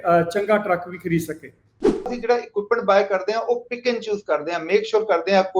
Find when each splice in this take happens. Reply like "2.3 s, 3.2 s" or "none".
2.1 s

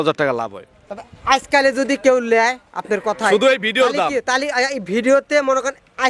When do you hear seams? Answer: none

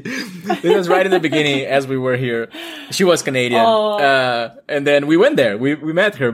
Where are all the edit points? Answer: none

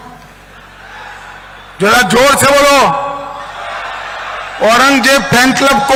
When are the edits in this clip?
none

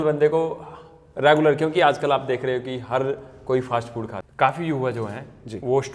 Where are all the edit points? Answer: 4.2 s

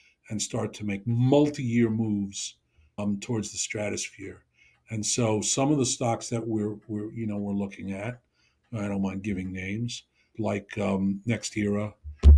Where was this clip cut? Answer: 3.0 s, 10.3 s

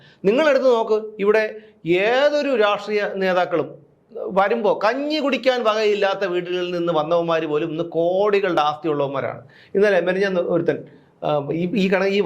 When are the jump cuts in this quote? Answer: none

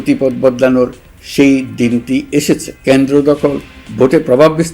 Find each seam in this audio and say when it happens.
2.7 s

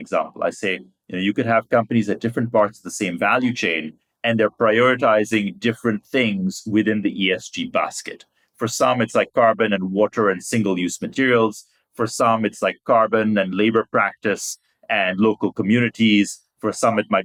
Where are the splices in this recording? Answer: none

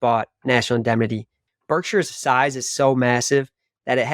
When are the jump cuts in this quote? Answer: 1.3 s

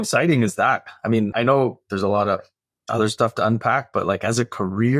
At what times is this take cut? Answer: 1.3 s

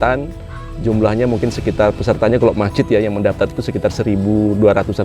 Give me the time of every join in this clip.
none

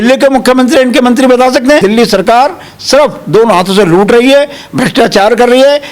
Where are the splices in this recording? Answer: 1.8 s

